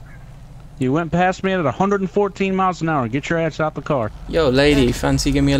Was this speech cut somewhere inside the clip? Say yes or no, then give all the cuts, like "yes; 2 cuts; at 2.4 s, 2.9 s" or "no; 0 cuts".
yes; 1 cut; at 4.2 s